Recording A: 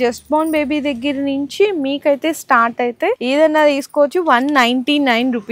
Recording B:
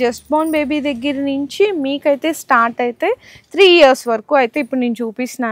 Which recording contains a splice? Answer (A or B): A